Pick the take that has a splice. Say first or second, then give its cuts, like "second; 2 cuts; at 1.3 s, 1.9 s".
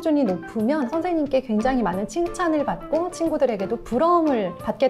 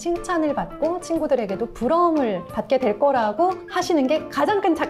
first; 1 cut; at 0.9 s